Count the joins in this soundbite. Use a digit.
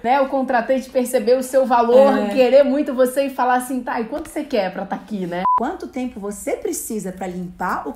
1